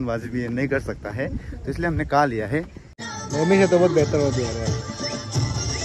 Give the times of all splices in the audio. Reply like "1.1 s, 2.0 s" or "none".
3.0 s